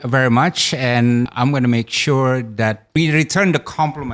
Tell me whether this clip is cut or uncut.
cut